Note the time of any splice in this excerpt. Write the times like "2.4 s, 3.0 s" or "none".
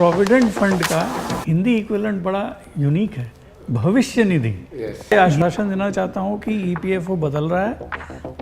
5.1 s